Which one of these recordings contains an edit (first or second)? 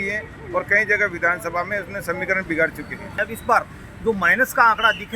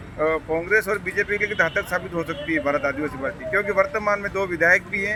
first